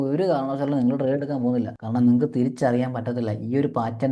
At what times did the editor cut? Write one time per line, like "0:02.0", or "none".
0:01.8